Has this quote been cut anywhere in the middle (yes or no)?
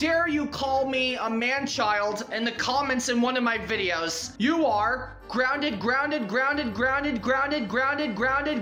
no